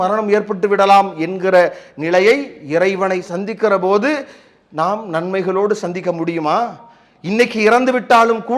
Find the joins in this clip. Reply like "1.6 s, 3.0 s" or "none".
none